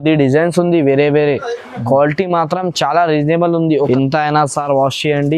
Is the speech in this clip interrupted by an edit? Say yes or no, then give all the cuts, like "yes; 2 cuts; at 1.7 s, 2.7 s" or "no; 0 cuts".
yes; 1 cut; at 3.9 s